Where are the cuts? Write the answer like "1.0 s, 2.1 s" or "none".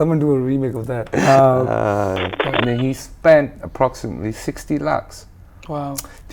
2.3 s

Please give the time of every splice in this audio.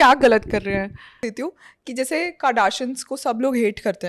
1.1 s

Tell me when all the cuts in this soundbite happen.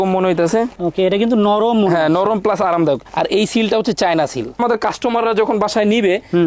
4.6 s

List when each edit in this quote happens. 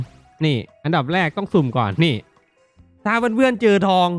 none

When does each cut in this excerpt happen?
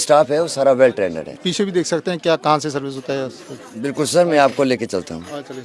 1.3 s

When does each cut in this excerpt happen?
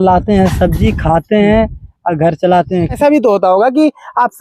3.0 s

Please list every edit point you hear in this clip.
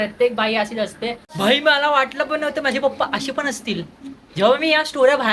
1.3 s

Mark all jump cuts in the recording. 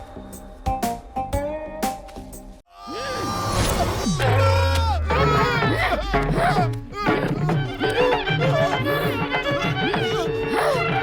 2.8 s

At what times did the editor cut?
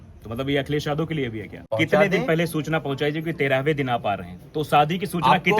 1.6 s

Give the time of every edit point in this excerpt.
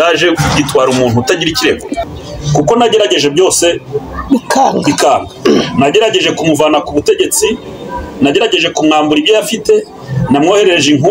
2.0 s

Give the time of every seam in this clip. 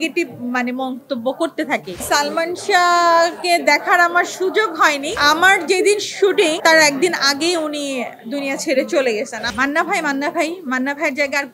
1.9 s, 5.2 s, 6.6 s, 9.4 s

